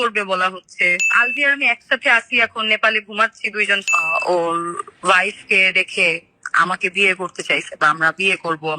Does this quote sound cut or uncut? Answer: cut